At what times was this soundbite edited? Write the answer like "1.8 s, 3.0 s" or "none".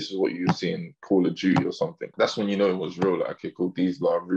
2.1 s